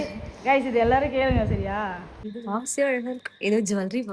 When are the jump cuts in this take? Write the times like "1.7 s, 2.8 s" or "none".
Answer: 2.2 s

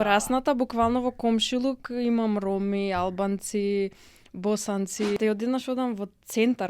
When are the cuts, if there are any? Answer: 5.2 s

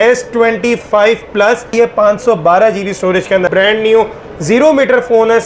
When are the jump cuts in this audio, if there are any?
1.7 s, 3.5 s

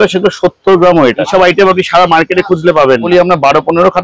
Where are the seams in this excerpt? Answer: 1.3 s, 3.1 s

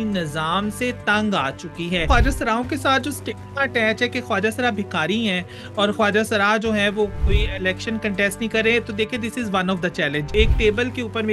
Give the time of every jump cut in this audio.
2.1 s, 7.2 s, 10.3 s

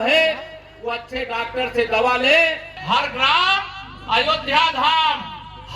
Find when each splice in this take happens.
2.7 s

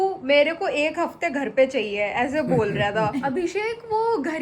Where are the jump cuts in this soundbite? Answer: 3.3 s

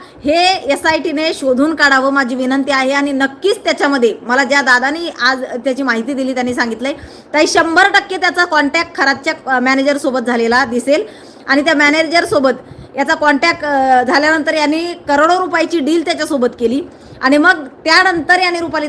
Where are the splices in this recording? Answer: none

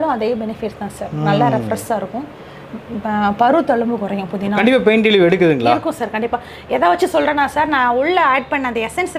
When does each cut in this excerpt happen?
4.6 s

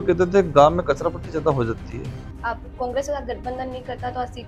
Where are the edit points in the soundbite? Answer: 2.2 s

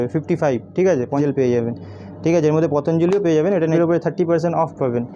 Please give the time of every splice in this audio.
1.2 s, 3.7 s

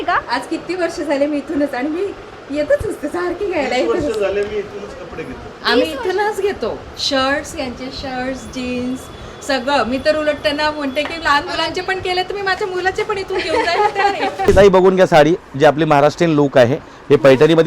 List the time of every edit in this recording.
14.5 s

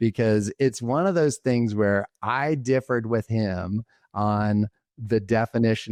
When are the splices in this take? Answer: none

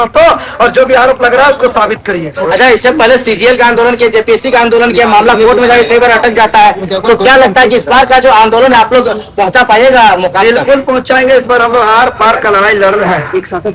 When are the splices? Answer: none

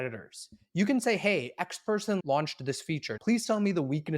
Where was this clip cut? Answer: 2.2 s, 3.1 s

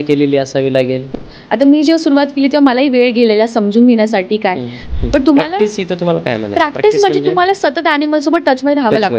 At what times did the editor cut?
1.0 s, 4.8 s

